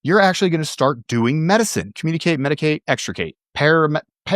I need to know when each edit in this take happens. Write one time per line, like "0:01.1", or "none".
0:02.0
0:03.4